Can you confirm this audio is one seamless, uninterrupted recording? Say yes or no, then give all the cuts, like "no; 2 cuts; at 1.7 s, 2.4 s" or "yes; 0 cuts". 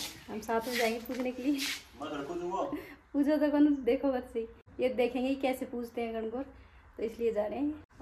yes; 0 cuts